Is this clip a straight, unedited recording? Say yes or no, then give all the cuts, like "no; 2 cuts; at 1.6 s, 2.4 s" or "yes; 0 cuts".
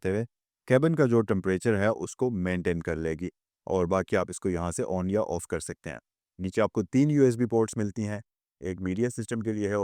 yes; 0 cuts